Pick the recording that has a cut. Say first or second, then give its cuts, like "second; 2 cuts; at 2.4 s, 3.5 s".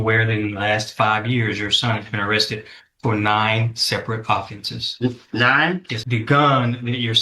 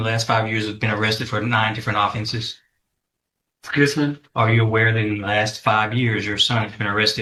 first; 1 cut; at 6.0 s